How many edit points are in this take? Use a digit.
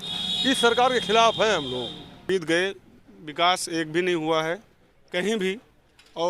1